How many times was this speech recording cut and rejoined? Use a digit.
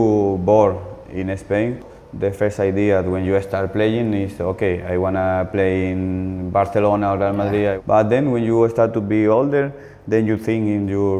2